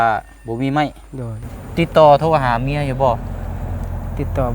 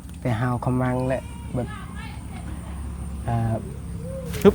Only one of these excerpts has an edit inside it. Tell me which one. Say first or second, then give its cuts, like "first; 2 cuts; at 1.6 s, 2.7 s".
first; 1 cut; at 1.6 s